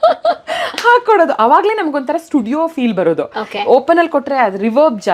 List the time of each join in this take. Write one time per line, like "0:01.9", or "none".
none